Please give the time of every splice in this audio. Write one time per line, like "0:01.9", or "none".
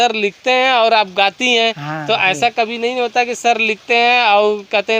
none